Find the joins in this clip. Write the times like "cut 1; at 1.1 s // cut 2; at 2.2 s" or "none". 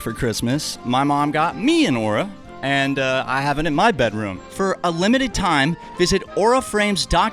cut 1; at 4.4 s

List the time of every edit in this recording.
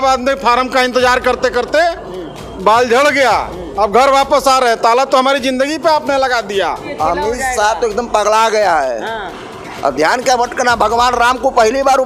cut 1; at 6.9 s

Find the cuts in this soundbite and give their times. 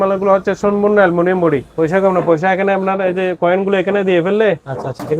cut 1; at 1.7 s

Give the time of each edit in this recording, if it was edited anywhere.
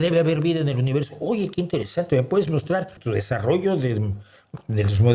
cut 1; at 3.0 s

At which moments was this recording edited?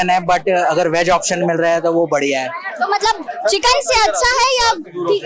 none

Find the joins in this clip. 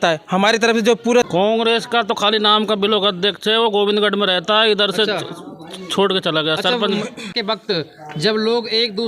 cut 1; at 1.3 s // cut 2; at 7.3 s

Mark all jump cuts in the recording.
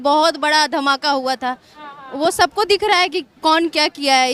none

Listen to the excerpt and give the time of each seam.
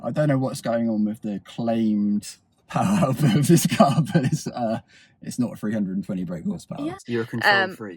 cut 1; at 7.0 s

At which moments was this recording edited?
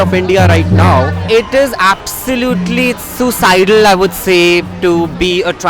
cut 1; at 1.2 s

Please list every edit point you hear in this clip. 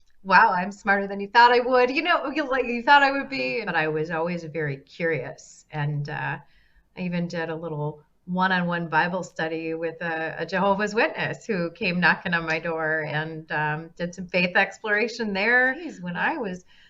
cut 1; at 3.6 s // cut 2; at 16.0 s

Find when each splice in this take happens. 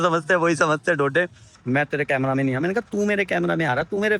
cut 1; at 1.5 s

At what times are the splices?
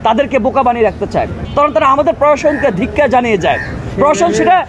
cut 1; at 1.4 s

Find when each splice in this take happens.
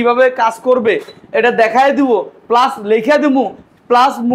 none

